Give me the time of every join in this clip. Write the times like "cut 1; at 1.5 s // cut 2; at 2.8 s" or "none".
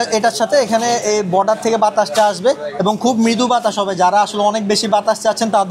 none